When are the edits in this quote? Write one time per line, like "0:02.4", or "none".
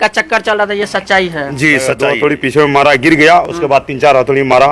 0:02.0

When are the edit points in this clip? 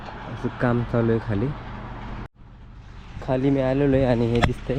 0:02.3

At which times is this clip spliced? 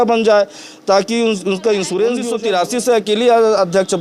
0:02.3

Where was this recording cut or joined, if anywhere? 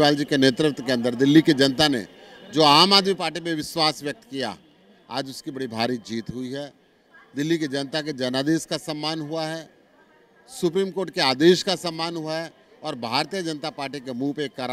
none

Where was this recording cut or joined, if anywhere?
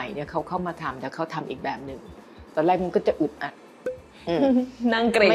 none

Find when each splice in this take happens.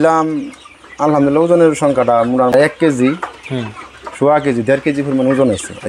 0:02.5

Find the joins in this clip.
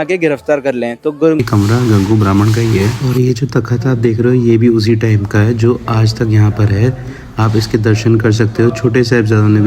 0:01.5

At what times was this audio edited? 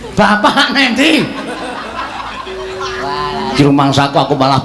0:03.5

